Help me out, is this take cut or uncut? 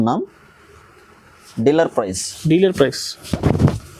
uncut